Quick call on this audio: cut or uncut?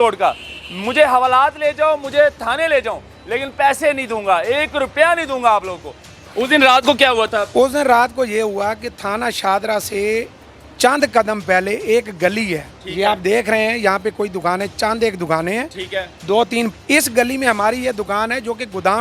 cut